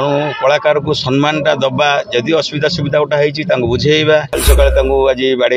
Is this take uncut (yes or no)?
no